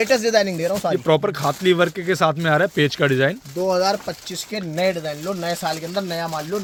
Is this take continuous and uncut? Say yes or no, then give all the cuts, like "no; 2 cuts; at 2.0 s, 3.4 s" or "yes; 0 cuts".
yes; 0 cuts